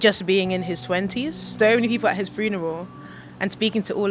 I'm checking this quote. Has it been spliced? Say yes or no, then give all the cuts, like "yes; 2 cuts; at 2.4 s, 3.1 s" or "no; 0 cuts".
yes; 1 cut; at 1.5 s